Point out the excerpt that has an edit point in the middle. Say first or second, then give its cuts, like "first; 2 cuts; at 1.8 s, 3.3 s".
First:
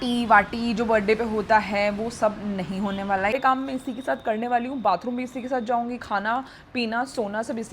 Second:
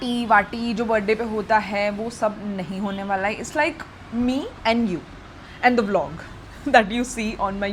first; 1 cut; at 3.3 s